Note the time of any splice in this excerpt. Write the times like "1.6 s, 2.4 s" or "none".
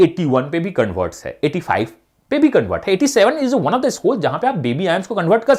none